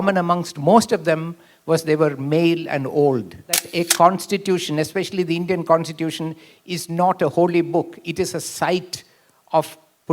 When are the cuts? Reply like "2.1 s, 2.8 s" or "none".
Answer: 3.7 s